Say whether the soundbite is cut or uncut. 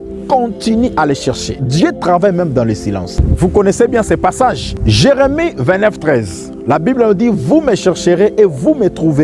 uncut